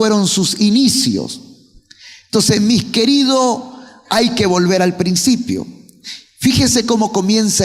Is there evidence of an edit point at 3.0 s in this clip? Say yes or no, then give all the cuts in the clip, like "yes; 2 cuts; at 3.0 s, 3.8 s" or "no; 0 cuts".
yes; 1 cut; at 3.0 s